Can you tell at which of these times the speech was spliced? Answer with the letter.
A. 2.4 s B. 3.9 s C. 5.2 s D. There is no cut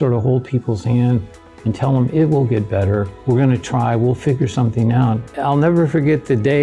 D